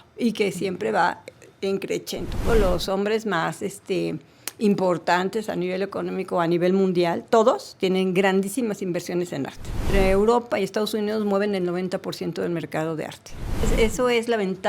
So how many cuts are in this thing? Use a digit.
3